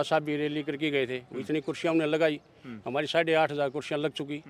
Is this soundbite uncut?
yes; 0 cuts

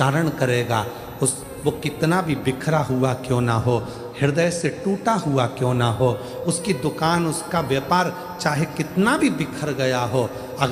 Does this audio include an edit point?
no; 0 cuts

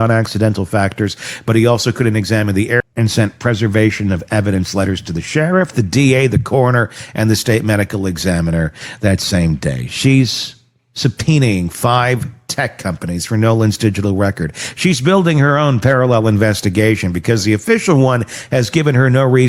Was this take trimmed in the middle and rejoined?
yes; 1 cut; at 2.8 s

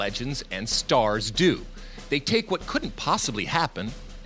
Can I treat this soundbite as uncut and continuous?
yes; 0 cuts

